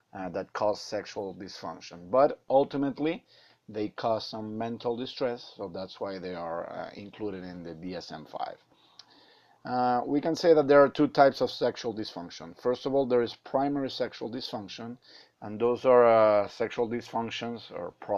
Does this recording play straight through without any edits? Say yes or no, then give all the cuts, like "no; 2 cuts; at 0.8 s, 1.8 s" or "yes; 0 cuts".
yes; 0 cuts